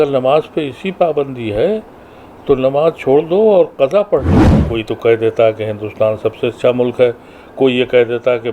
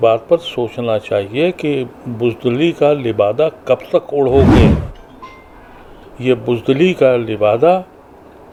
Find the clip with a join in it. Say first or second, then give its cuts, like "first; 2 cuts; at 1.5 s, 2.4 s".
first; 1 cut; at 4.6 s